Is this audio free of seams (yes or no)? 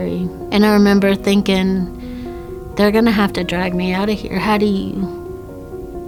yes